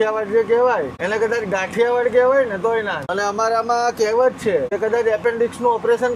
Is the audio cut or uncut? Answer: cut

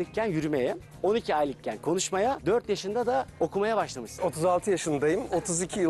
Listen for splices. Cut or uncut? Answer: cut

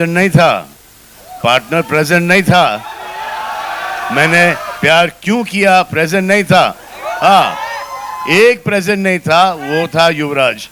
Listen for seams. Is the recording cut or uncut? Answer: uncut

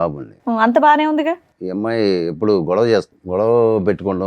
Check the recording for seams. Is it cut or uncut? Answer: cut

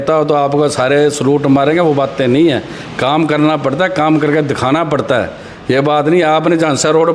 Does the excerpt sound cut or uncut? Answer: uncut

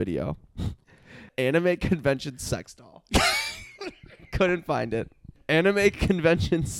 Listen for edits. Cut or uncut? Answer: cut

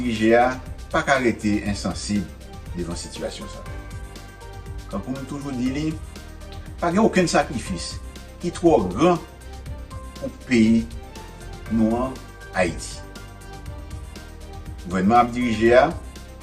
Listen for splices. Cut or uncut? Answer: cut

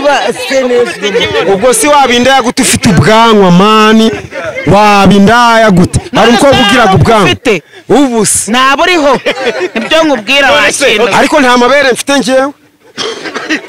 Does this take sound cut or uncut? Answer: uncut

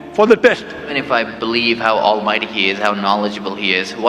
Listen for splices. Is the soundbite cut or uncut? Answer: cut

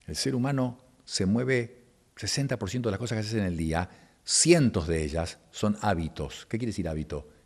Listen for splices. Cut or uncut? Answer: uncut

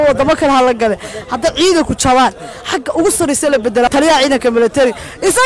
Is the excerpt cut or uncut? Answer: cut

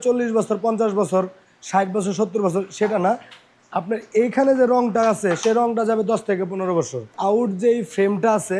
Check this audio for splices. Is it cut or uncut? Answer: cut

